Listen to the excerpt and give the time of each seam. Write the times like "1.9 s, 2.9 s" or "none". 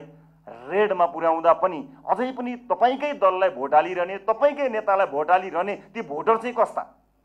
none